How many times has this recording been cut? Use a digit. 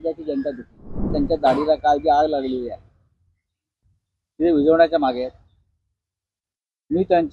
1